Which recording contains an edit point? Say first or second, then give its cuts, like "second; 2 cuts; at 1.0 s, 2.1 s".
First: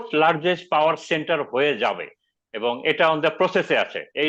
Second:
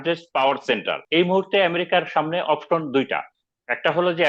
second; 1 cut; at 1.0 s